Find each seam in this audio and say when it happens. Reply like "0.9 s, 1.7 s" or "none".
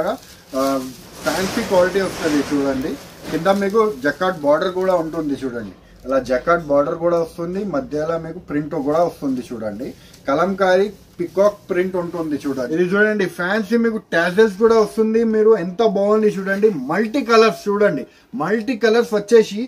12.7 s